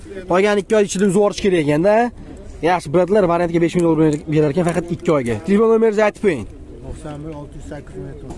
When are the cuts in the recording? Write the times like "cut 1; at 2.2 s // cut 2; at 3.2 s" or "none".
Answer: none